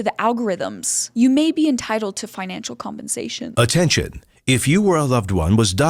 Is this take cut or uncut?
uncut